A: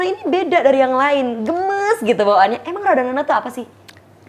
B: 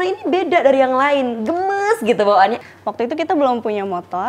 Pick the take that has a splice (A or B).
B